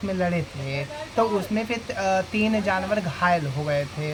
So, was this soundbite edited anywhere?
no; 0 cuts

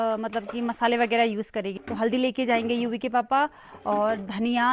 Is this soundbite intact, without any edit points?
no; 1 cut; at 1.8 s

